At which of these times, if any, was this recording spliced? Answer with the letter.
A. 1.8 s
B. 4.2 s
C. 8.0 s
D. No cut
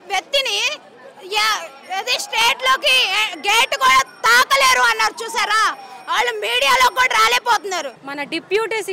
C